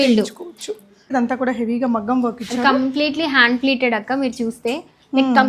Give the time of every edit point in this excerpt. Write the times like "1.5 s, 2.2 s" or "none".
1.1 s